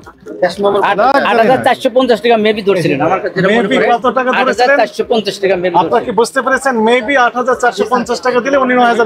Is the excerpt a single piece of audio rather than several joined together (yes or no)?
yes